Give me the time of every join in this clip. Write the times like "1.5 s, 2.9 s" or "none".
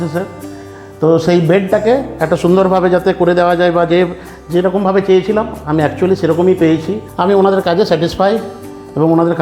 7.0 s